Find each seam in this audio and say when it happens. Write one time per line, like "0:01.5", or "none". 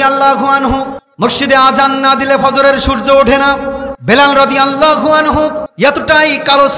0:01.0
0:03.9
0:05.7